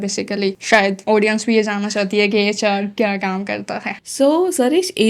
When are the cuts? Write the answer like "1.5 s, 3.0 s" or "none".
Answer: none